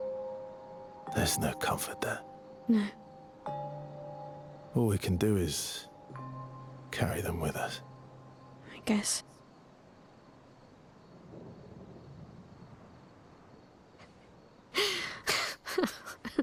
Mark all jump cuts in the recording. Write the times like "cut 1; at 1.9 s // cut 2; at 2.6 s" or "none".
none